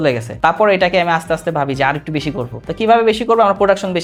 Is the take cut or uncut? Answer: uncut